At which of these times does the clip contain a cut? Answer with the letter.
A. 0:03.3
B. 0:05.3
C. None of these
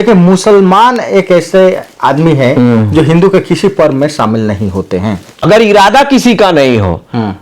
B